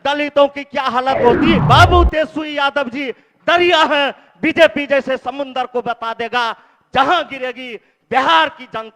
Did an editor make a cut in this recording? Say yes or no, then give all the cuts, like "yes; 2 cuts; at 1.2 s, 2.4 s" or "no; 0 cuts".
yes; 1 cut; at 1.6 s